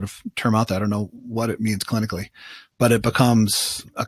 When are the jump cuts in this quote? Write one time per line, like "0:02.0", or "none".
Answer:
none